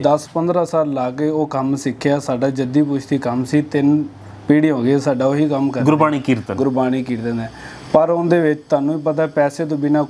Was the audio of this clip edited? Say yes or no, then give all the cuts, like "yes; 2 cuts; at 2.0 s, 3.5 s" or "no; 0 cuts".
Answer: no; 0 cuts